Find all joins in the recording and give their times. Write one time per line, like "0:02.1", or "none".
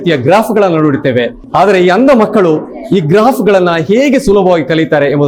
none